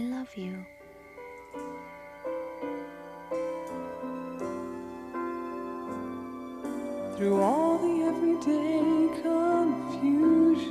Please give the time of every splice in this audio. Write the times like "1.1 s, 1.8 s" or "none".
8.2 s